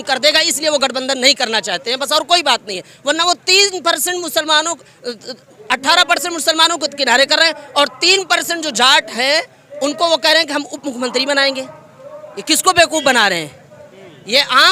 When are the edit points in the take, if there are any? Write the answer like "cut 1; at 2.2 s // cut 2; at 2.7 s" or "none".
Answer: none

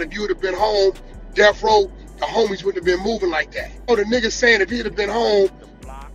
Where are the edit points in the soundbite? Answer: cut 1; at 3.9 s

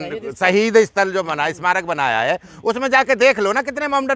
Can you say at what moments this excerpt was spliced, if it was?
none

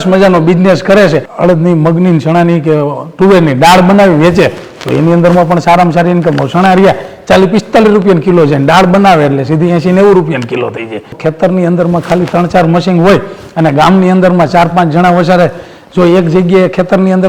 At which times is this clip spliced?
cut 1; at 1.3 s // cut 2; at 11.1 s

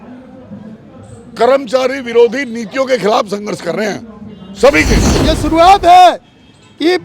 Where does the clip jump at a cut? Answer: cut 1; at 5.3 s

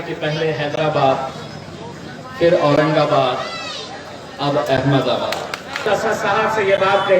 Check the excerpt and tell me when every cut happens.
cut 1; at 5.8 s

